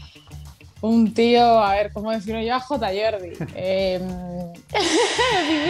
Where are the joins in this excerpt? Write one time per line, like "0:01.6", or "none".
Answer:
none

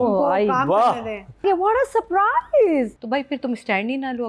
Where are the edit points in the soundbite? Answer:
0:01.4
0:03.0

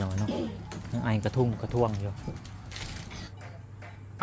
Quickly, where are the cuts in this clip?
0:03.2

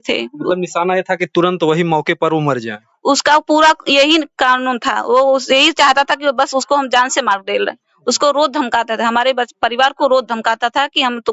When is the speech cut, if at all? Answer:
none

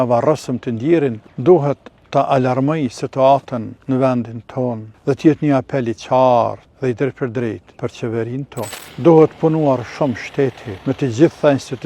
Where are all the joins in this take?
0:01.3
0:01.9
0:03.7
0:04.9
0:06.7
0:07.7
0:08.8
0:10.7

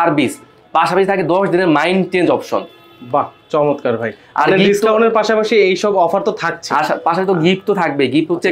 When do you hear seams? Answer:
none

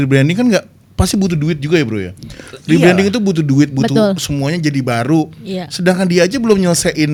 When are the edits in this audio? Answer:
none

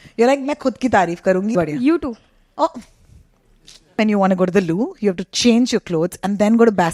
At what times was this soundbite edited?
0:01.5
0:04.0

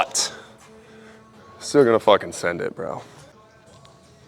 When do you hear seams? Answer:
0:03.3

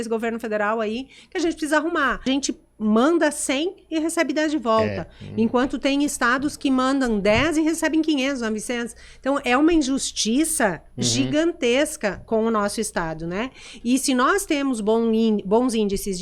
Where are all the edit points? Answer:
0:02.3

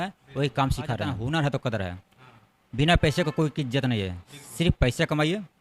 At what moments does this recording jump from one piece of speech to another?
0:01.1

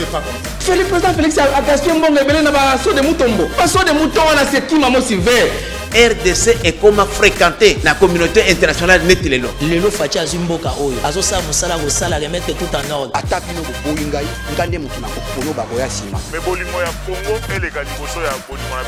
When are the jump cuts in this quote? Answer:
none

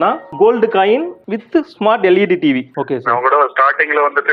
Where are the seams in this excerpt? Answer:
0:02.6

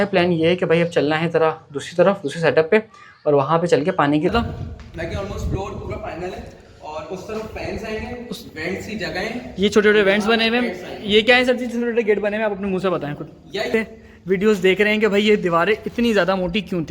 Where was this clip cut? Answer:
0:04.3
0:13.7

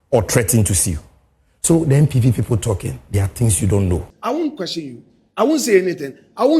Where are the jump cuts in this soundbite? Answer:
0:04.1

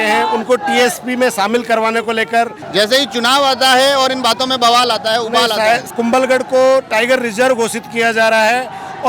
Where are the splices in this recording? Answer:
0:02.6
0:05.9

